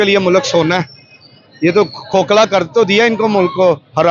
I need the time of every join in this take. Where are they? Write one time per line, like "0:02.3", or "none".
none